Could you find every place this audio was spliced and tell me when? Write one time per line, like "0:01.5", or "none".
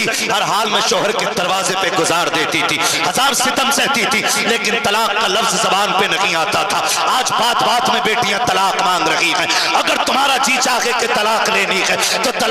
none